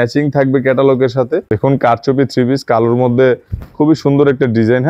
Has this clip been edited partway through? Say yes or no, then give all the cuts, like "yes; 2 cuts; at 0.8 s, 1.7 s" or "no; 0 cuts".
yes; 1 cut; at 1.4 s